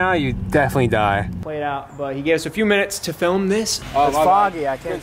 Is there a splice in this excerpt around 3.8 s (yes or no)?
yes